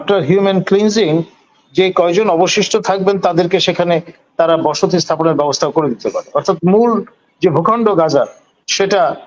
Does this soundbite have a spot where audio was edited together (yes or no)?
no